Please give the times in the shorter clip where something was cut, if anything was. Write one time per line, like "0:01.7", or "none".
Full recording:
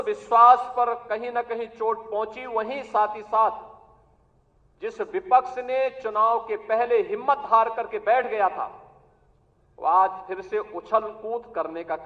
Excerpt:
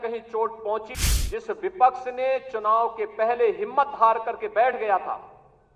0:00.9